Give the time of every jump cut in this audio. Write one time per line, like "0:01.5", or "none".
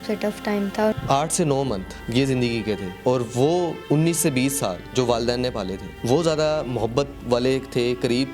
0:00.9
0:01.9
0:02.9
0:03.8
0:04.8
0:05.9
0:07.2

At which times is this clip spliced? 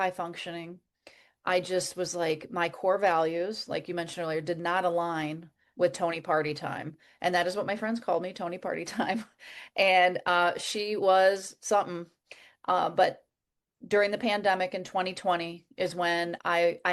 none

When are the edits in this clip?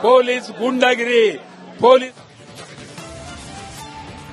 0:01.9

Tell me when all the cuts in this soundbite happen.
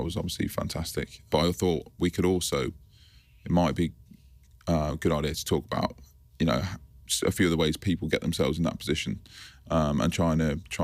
0:01.3

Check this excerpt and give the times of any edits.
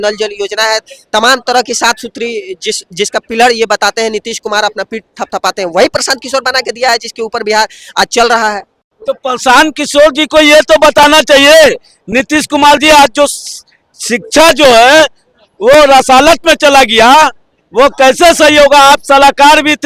none

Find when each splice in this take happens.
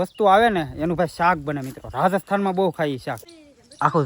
0:03.2

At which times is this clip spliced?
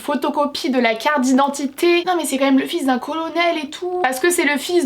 0:02.1
0:04.0

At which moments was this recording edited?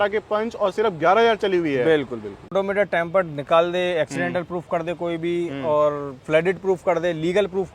0:02.5

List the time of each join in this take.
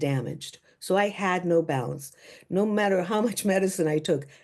none

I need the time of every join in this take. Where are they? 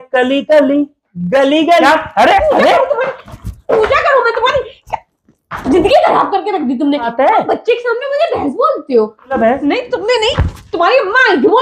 0:01.8
0:07.1
0:09.3

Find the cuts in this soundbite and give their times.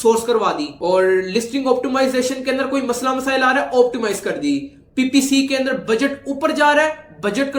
none

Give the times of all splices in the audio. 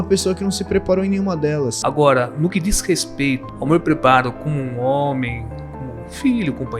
0:01.8
0:03.5

